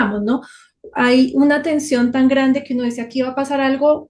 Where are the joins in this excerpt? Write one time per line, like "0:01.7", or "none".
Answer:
none

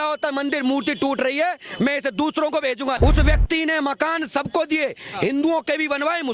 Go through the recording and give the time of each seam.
0:03.0

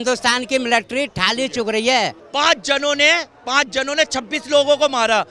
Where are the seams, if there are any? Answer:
0:02.2

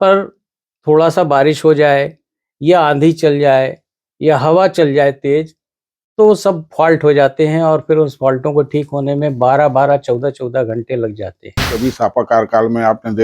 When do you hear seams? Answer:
0:11.7

